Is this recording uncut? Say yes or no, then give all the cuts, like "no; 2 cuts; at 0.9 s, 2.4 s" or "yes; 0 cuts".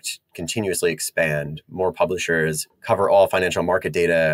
no; 1 cut; at 2.7 s